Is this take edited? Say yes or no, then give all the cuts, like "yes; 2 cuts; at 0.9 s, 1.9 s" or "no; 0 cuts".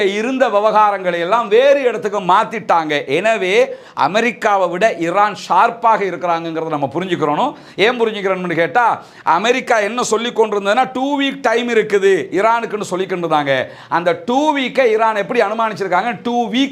no; 0 cuts